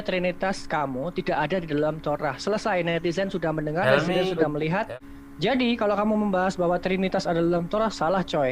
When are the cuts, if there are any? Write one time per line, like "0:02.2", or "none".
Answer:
0:04.9